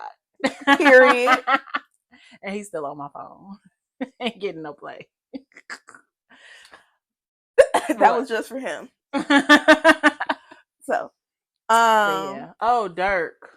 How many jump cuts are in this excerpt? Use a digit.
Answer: 0